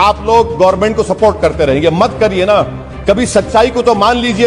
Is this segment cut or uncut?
uncut